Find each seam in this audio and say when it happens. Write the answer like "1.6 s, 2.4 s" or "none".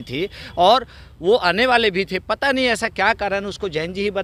none